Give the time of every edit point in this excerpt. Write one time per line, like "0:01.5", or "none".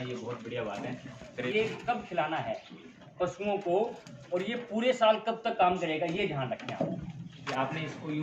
0:01.5
0:07.4